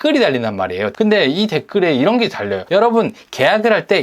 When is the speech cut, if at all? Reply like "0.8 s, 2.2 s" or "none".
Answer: 0.9 s, 2.6 s